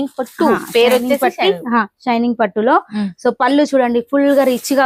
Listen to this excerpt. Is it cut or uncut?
uncut